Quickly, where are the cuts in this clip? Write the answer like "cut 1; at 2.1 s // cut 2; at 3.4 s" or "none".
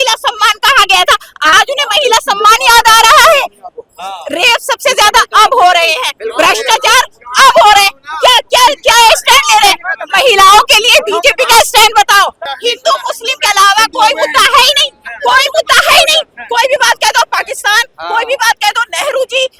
cut 1; at 1.5 s // cut 2; at 12.5 s